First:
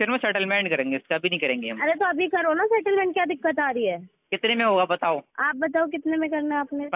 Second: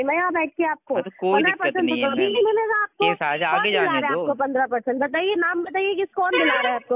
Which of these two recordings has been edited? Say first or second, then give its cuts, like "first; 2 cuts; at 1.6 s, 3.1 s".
first; 1 cut; at 5.4 s